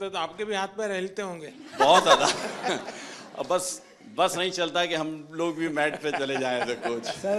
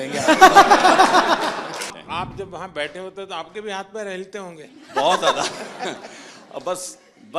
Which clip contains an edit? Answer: second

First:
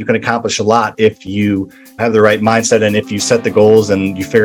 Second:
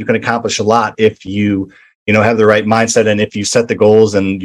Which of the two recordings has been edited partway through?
first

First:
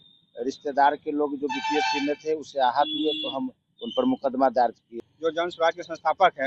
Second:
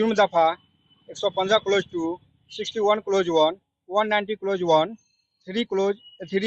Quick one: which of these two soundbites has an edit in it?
first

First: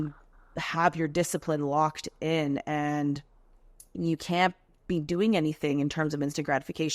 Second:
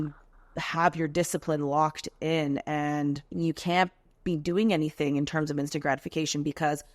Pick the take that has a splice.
second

